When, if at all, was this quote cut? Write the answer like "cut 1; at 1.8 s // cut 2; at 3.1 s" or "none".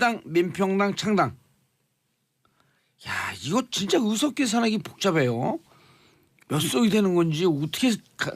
cut 1; at 2.4 s